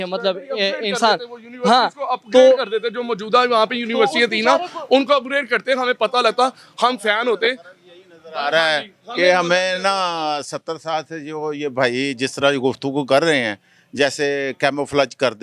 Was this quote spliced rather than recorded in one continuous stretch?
no; 0 cuts

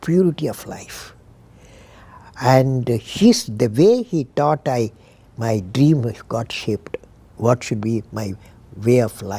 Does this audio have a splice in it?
no; 0 cuts

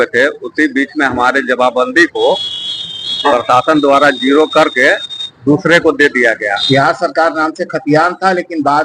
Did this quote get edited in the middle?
yes; 1 cut; at 6.6 s

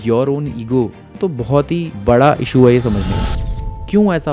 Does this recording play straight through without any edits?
no; 2 cuts; at 1.3 s, 3.4 s

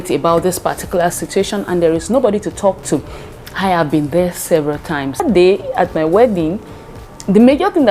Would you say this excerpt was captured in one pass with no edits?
no; 1 cut; at 5.2 s

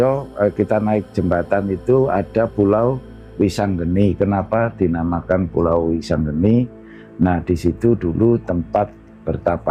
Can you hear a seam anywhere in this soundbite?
no; 0 cuts

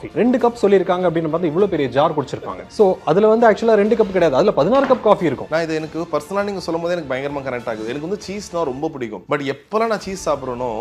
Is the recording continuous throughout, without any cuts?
no; 1 cut; at 5.4 s

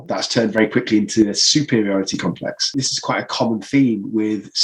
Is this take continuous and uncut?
no; 1 cut; at 2.9 s

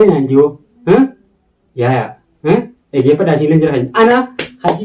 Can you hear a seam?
no; 0 cuts

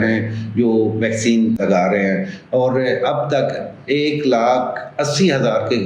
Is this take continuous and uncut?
no; 1 cut; at 1.6 s

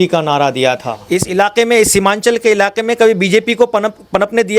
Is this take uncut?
no; 1 cut; at 0.9 s

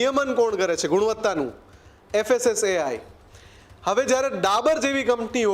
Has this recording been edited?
no; 0 cuts

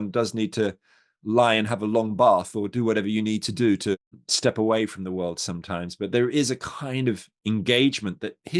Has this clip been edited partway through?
yes; 2 cuts; at 4.2 s, 7.3 s

